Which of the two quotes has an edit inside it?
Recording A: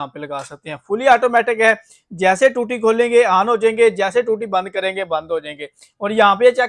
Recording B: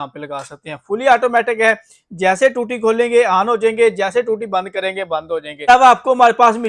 B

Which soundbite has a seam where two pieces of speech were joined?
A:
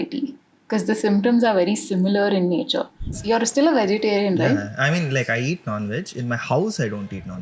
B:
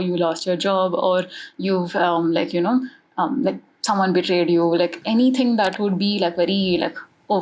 A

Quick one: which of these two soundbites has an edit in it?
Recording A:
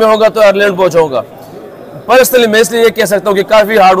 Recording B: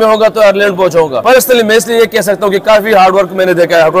B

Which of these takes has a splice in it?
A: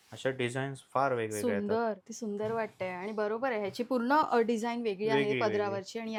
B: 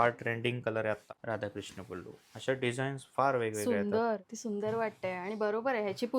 B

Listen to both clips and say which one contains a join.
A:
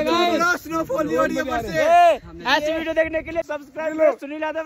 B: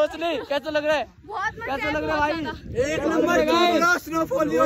A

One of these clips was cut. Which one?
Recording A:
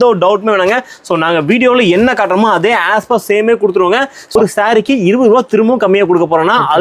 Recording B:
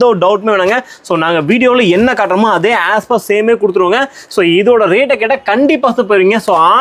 A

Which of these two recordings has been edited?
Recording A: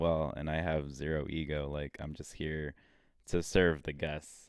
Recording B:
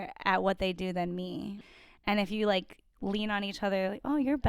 B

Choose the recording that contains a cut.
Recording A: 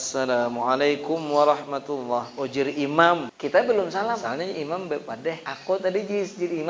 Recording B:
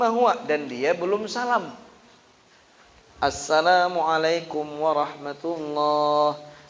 A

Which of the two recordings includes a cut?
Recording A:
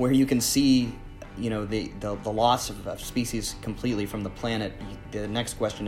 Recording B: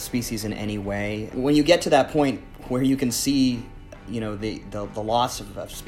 B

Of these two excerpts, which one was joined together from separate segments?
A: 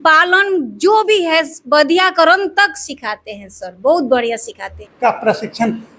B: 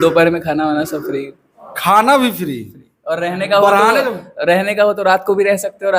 A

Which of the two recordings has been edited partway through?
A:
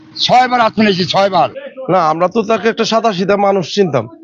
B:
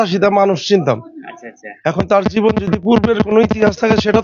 A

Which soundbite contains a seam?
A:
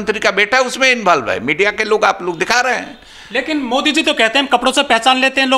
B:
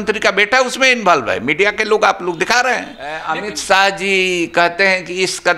B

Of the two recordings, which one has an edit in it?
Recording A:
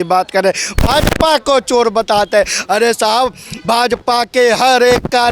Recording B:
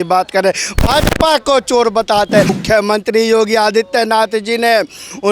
B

